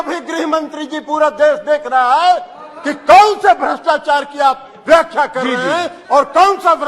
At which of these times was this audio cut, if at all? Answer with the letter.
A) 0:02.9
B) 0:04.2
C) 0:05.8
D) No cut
D